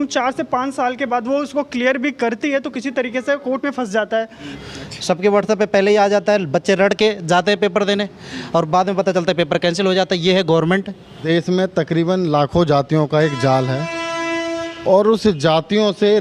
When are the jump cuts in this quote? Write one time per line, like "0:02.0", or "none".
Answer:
0:04.5
0:11.2

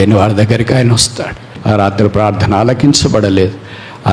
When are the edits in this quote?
0:01.5

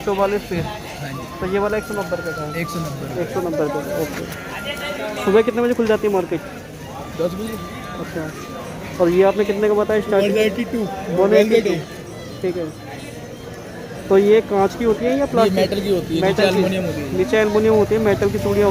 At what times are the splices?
none

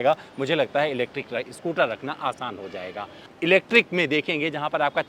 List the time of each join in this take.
0:03.2

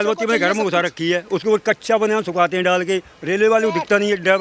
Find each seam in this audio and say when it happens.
none

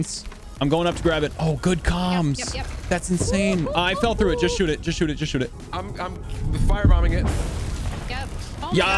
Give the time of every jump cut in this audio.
0:05.5

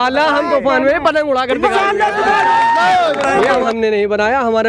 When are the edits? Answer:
0:03.7

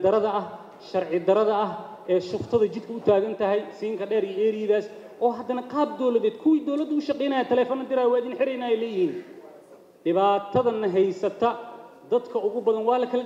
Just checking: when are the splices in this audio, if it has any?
none

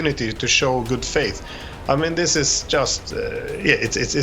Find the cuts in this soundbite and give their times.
none

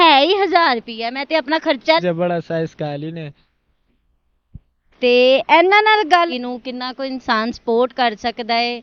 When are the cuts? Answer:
0:02.0
0:06.3

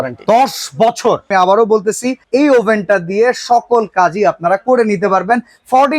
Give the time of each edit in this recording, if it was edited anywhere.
0:01.3

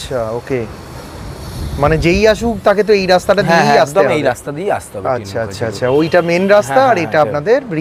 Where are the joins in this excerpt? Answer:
none

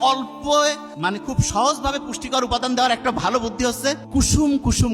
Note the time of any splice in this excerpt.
0:01.1
0:04.0

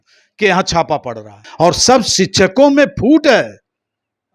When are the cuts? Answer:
0:01.4

